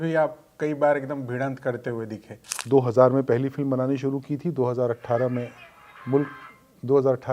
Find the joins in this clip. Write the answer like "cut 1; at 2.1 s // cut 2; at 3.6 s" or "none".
cut 1; at 2.6 s